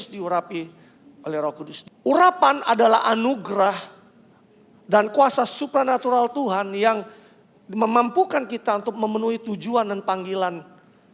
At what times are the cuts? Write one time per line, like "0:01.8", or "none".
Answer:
0:01.8